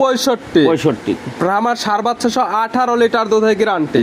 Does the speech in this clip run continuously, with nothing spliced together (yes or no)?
yes